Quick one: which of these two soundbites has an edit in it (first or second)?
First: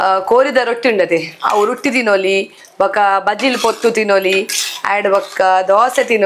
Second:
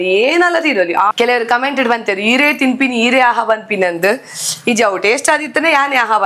second